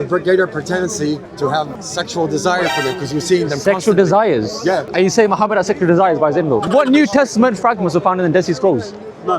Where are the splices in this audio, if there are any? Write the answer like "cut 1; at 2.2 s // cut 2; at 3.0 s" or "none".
cut 1; at 1.4 s // cut 2; at 4.9 s // cut 3; at 6.7 s

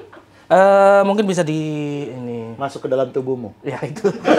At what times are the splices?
none

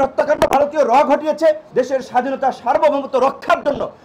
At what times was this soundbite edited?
cut 1; at 1.6 s

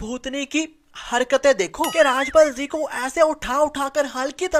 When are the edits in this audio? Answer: none

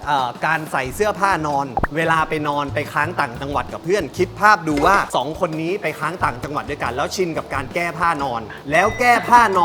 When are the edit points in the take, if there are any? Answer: cut 1; at 1.7 s

